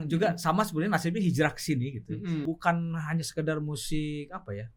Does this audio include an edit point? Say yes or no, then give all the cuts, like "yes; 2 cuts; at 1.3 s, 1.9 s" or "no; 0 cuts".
yes; 1 cut; at 2.4 s